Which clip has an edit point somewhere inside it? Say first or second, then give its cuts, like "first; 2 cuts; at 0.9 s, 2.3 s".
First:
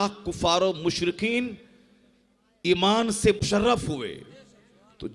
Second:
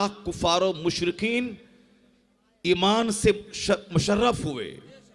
first; 1 cut; at 3.5 s